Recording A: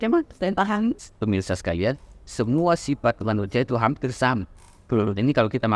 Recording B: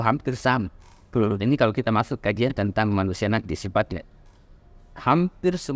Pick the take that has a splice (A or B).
A